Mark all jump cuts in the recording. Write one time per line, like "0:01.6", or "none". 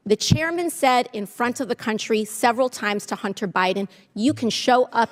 none